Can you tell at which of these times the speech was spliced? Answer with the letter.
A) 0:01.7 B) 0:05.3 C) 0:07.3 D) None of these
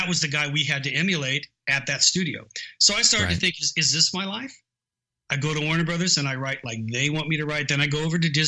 D